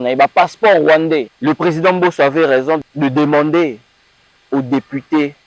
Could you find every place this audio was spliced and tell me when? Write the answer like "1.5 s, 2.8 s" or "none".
1.3 s, 2.8 s